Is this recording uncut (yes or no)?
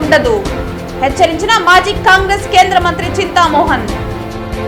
yes